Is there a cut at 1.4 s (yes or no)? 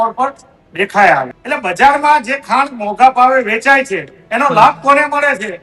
yes